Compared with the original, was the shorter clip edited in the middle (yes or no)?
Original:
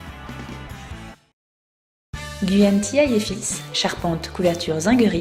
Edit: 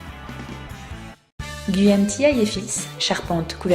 yes